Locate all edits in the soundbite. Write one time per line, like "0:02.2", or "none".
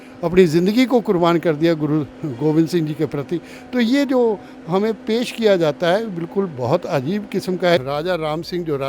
0:07.8